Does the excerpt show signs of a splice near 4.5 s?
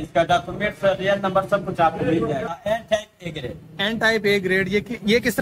no; 1 cut; at 2.6 s

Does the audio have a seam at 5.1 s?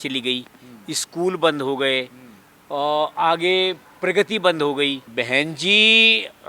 yes; 1 cut; at 5.1 s

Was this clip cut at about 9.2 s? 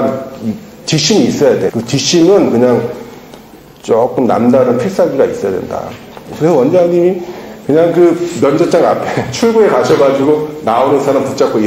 no; 2 cuts; at 1.7 s, 6.3 s

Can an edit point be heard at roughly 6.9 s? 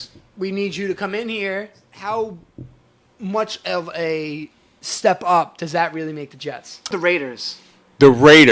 yes; 2 cuts; at 1.9 s, 6.9 s

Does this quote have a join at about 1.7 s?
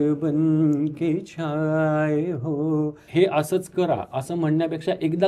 no; 1 cut; at 3.0 s

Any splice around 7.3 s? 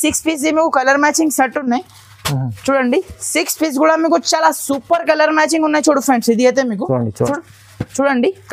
yes; 1 cut; at 7.3 s

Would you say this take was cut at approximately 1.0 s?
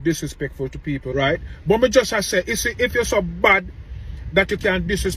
yes; 1 cut; at 1.0 s

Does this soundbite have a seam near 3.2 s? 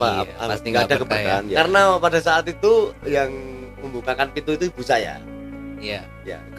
no; 1 cut; at 1.5 s

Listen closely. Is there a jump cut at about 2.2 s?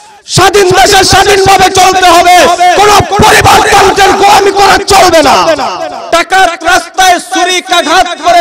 no; 1 cut; at 5.9 s

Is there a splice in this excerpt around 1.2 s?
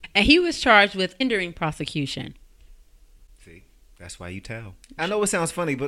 yes; 2 cuts; at 1.2 s, 4.9 s

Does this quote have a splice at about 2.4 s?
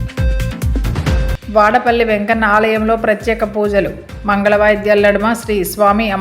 no; 1 cut; at 1.0 s

